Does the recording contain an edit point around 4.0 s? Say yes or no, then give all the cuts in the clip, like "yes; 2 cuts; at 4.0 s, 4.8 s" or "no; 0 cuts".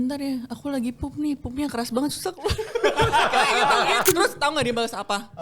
yes; 1 cut; at 4.0 s